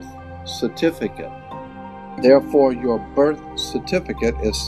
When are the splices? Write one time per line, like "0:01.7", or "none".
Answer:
0:01.7